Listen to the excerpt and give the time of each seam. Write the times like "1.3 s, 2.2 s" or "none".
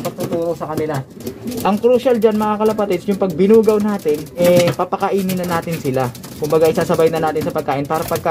1.5 s, 4.3 s